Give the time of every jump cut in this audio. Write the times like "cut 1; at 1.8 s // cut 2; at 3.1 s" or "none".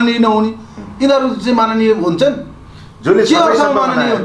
none

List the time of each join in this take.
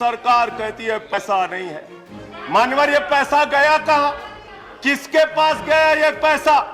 cut 1; at 1.1 s

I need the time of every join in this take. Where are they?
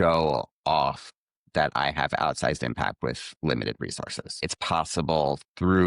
cut 1; at 4.5 s

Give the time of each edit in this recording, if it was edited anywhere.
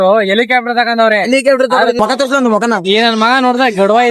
cut 1; at 2.0 s

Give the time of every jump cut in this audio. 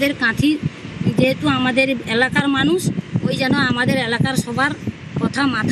none

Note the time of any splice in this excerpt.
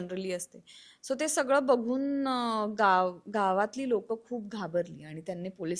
none

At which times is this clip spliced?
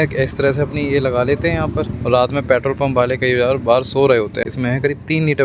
cut 1; at 1.9 s // cut 2; at 4.5 s

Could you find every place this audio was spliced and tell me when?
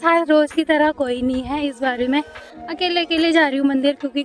none

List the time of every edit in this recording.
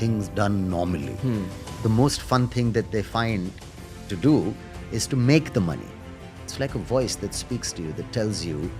cut 1; at 1.6 s // cut 2; at 6.4 s

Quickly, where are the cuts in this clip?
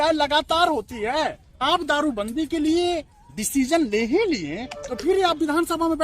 cut 1; at 1.6 s

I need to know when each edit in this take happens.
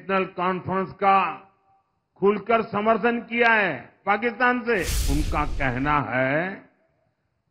cut 1; at 5.0 s

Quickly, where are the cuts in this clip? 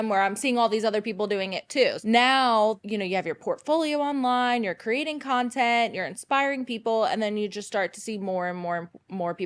cut 1; at 2.0 s // cut 2; at 2.8 s

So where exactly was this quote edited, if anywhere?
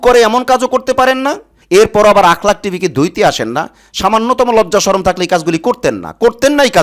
cut 1; at 1.5 s

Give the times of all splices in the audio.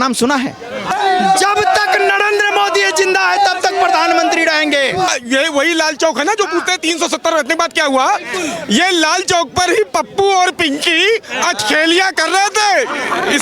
cut 1; at 0.9 s // cut 2; at 5.1 s

